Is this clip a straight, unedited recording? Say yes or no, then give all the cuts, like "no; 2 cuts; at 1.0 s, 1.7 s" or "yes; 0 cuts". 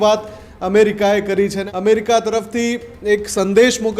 no; 1 cut; at 1.6 s